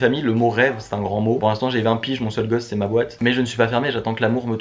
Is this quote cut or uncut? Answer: uncut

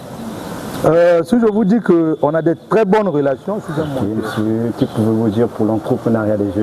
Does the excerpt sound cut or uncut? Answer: cut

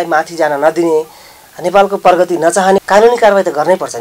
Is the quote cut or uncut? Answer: cut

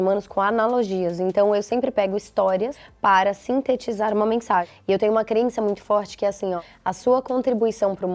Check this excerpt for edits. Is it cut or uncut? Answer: cut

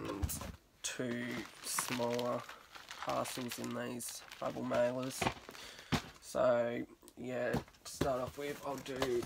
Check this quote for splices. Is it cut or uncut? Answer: uncut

